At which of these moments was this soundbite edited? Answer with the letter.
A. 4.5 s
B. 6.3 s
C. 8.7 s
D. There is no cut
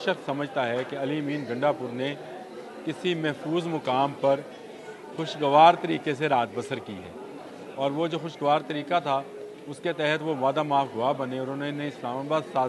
D